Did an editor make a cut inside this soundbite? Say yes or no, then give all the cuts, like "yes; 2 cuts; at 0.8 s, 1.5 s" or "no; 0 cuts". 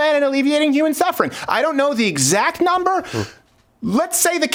no; 0 cuts